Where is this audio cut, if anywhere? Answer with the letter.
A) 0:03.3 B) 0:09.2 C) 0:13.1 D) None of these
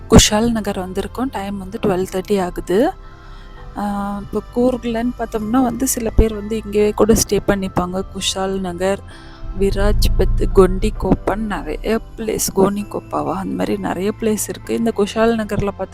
D